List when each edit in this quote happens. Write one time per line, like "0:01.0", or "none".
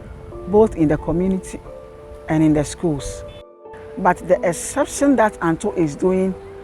0:03.5